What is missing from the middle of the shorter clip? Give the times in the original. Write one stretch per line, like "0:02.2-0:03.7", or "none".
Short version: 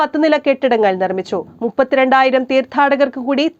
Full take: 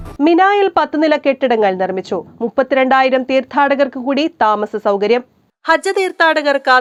none